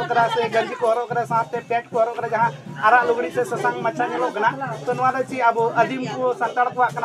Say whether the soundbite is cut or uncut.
uncut